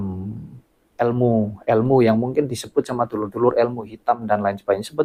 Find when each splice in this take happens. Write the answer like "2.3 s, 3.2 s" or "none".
none

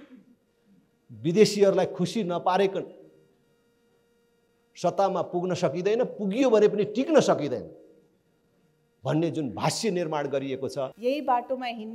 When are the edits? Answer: 10.9 s

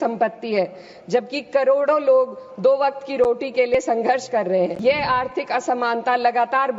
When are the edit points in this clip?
4.8 s

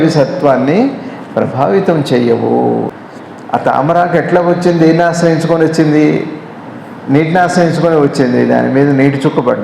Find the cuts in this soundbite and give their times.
2.9 s

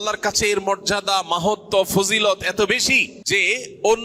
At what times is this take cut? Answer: 3.1 s

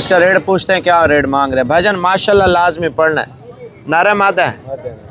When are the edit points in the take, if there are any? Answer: none

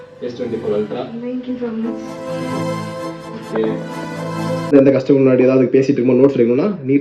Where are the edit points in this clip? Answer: 4.7 s

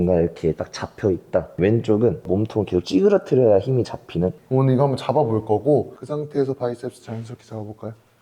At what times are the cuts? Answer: 4.3 s, 5.9 s

